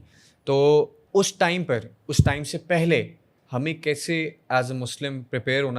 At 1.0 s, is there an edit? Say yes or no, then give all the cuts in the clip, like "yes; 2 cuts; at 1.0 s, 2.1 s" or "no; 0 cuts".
yes; 1 cut; at 1.0 s